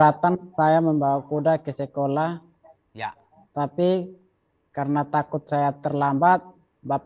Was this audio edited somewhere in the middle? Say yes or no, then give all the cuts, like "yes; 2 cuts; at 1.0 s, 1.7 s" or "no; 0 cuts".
no; 0 cuts